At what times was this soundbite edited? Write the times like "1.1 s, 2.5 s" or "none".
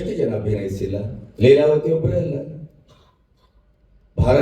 1.2 s